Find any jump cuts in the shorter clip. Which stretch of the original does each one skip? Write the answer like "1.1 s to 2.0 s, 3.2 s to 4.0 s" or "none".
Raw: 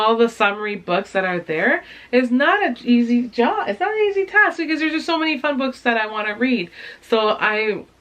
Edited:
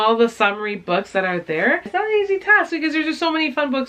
1.9 s to 3.7 s